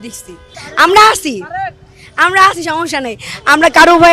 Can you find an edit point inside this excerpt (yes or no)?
no